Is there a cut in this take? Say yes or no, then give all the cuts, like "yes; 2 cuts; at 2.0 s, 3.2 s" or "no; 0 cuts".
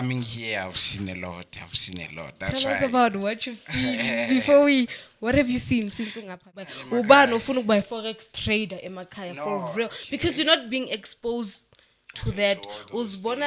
yes; 1 cut; at 6.8 s